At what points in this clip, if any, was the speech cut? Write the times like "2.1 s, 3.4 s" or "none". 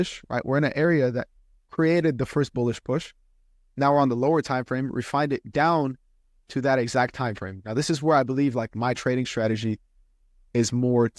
none